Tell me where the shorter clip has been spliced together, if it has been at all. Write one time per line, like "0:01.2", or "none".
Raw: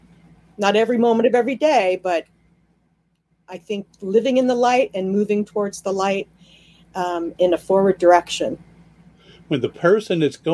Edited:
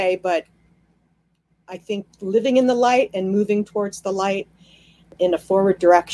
0:05.1